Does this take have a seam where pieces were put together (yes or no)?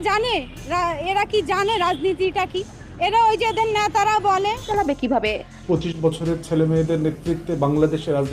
yes